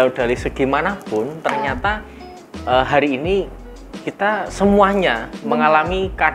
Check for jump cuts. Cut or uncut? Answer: uncut